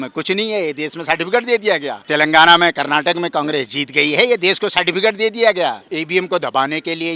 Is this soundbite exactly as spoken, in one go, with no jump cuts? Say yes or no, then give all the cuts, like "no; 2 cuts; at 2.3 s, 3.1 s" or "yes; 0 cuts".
no; 2 cuts; at 2.0 s, 6.0 s